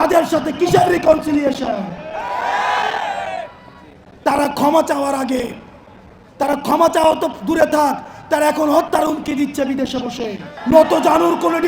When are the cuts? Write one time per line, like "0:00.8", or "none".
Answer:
0:10.5